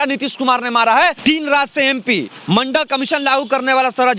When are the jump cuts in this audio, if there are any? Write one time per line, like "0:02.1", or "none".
0:01.2